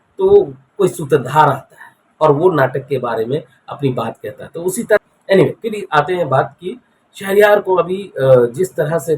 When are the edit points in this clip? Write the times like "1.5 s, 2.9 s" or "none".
5.0 s